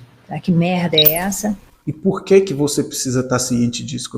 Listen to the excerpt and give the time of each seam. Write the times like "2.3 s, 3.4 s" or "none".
1.7 s